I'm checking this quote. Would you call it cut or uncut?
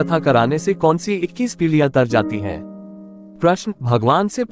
cut